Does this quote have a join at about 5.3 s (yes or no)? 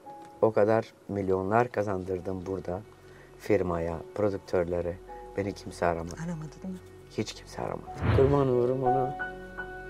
no